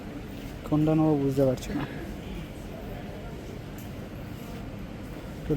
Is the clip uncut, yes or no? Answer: yes